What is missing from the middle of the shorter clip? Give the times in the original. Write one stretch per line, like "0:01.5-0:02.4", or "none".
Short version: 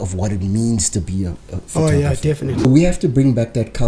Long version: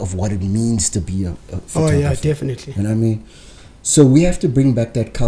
0:02.6-0:04.0